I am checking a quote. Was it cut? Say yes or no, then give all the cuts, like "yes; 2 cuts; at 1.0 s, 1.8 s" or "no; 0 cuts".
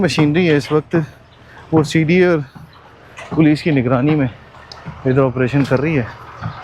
no; 0 cuts